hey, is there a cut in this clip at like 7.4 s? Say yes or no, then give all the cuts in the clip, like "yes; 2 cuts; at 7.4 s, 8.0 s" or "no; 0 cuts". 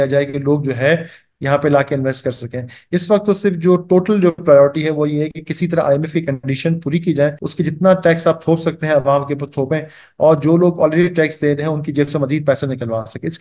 yes; 1 cut; at 7.4 s